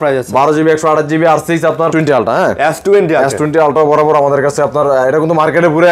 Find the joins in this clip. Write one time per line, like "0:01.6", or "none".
0:01.9